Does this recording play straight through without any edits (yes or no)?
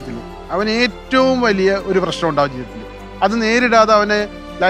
yes